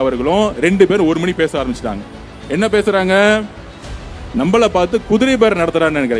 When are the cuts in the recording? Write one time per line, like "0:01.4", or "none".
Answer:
none